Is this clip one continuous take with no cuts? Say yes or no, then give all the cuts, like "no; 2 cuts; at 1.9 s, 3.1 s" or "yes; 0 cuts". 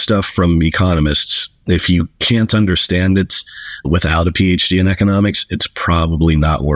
yes; 0 cuts